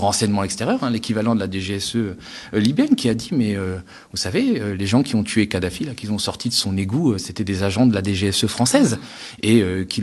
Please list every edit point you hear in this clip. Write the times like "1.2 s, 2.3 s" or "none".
none